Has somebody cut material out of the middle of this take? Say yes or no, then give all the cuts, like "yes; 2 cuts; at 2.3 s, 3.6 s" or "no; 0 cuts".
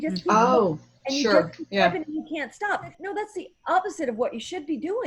yes; 1 cut; at 3.0 s